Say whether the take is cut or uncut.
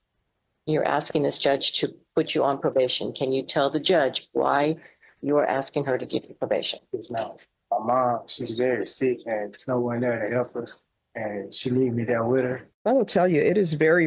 cut